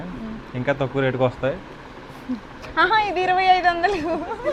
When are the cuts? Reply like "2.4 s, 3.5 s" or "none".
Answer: none

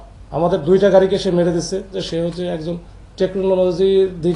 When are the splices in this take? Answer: 1.9 s

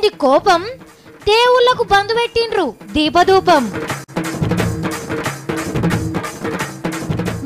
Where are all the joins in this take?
4.0 s, 5.9 s

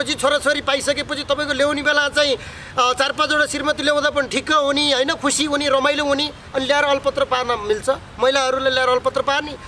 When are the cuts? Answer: none

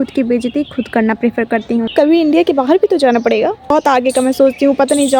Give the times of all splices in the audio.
1.9 s, 3.7 s

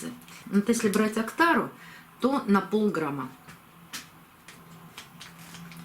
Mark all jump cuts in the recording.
4.5 s

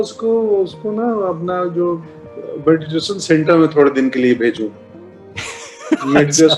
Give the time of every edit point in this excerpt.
none

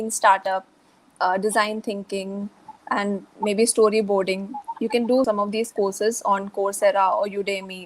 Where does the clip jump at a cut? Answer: 2.7 s, 5.3 s

